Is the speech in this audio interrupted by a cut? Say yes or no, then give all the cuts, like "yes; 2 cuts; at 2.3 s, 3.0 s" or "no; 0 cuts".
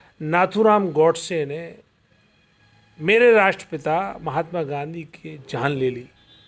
no; 0 cuts